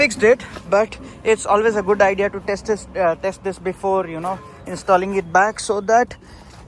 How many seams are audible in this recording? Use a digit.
0